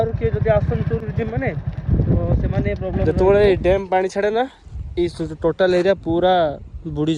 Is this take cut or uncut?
cut